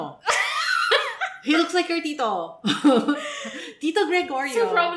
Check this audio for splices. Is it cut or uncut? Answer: uncut